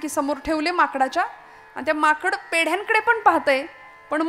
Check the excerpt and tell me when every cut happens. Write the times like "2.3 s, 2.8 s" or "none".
none